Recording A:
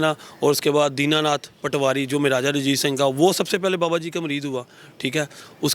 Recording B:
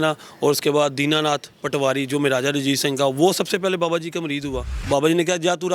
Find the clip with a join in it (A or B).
B